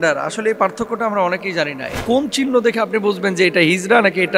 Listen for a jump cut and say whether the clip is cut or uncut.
cut